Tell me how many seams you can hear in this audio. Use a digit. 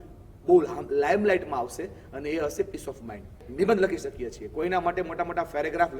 1